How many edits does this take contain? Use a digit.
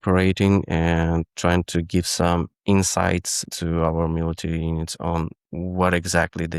1